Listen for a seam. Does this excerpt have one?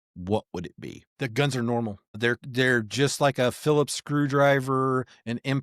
yes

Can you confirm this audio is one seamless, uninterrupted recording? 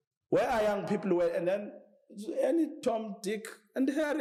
yes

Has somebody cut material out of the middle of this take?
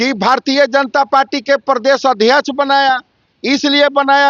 no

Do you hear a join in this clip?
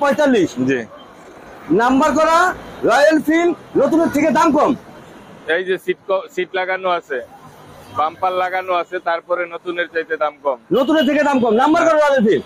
no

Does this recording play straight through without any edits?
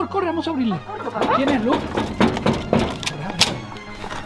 no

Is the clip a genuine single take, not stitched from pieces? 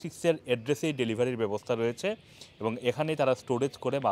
yes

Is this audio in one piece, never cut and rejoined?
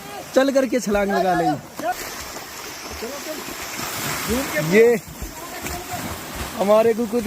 no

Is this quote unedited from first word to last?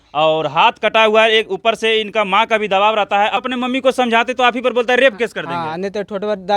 no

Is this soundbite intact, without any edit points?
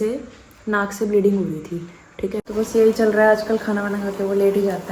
no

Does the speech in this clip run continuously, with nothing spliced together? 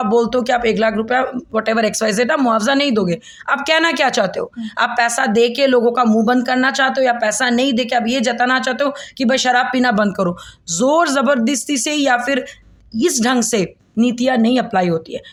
yes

